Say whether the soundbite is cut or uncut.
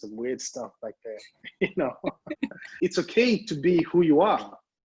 cut